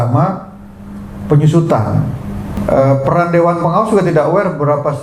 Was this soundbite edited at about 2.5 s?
yes; 1 cut; at 2.5 s

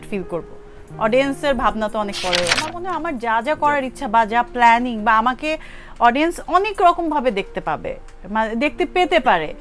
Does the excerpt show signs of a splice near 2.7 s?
yes; 1 cut; at 2.7 s

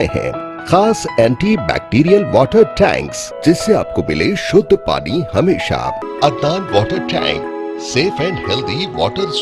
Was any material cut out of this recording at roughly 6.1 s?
yes; 2 cuts; at 3.2 s, 6.1 s

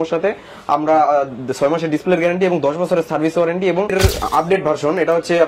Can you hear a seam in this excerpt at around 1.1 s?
no; 1 cut; at 3.9 s

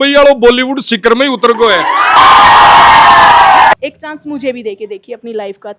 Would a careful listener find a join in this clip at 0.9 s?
no; 2 cuts; at 2.2 s, 3.7 s

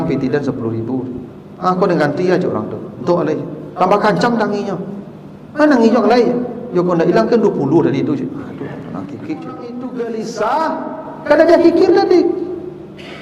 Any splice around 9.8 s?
yes; 1 cut; at 9.8 s

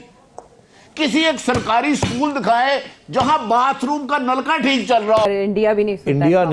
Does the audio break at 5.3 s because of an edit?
yes; 1 cut; at 5.3 s

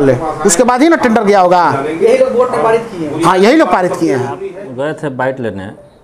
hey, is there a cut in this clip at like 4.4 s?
yes; 1 cut; at 4.4 s

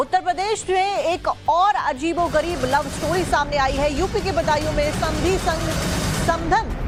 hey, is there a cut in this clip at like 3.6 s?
no; 0 cuts

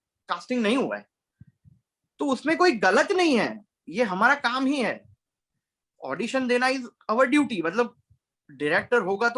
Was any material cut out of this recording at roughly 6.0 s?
no; 0 cuts

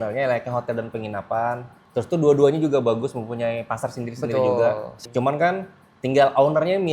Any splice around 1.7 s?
yes; 2 cuts; at 1.7 s, 4.9 s

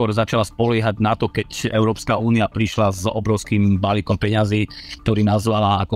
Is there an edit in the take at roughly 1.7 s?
yes; 1 cut; at 1.7 s

